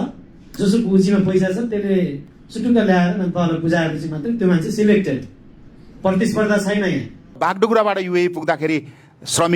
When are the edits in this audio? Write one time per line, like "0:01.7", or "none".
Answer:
0:07.2